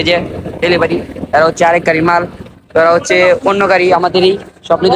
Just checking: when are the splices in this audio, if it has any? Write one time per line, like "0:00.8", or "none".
none